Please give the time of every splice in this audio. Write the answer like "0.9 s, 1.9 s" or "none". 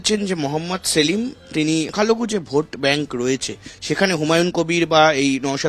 1.9 s